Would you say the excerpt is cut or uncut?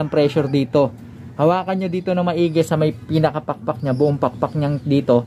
uncut